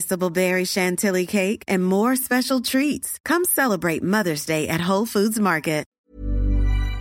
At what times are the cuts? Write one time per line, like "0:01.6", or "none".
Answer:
0:05.9